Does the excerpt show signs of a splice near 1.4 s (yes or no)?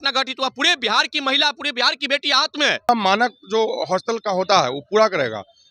no